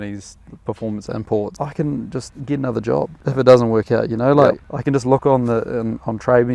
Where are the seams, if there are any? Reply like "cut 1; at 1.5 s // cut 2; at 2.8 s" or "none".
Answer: cut 1; at 1.5 s // cut 2; at 2.3 s // cut 3; at 3.2 s // cut 4; at 4.7 s